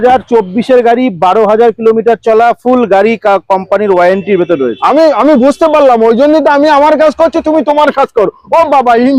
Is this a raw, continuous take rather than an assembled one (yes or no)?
yes